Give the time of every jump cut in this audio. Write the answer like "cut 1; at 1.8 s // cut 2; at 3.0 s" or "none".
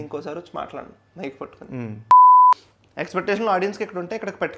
cut 1; at 1.9 s // cut 2; at 2.5 s

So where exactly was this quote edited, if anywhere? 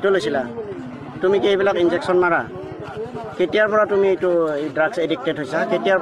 none

